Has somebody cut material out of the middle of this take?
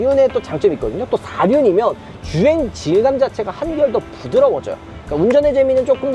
yes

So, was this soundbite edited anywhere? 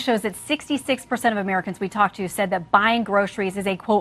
no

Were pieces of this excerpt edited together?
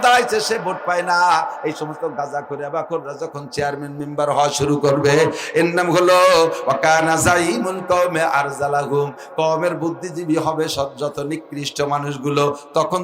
no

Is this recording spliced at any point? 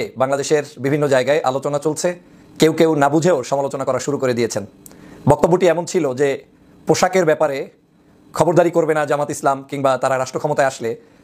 no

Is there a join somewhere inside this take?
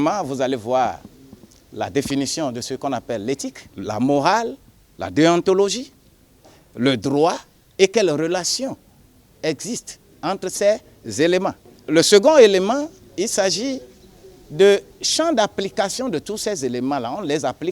yes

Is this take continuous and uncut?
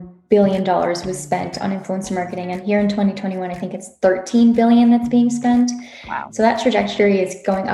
yes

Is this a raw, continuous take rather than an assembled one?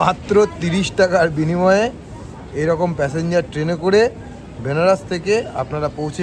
yes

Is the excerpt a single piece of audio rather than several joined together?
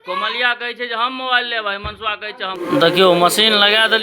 no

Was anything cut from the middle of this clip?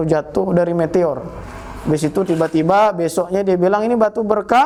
no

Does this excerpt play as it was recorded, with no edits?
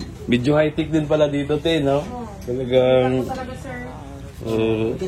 yes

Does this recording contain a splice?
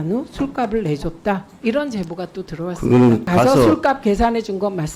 yes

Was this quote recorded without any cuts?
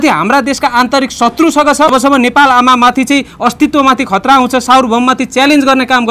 no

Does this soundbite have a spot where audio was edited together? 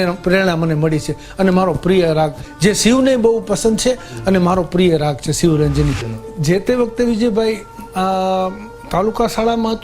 yes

